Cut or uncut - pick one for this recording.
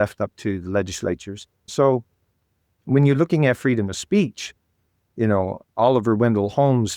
cut